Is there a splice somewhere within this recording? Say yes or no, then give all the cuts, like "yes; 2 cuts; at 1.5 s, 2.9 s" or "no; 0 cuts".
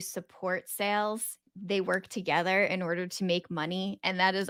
no; 0 cuts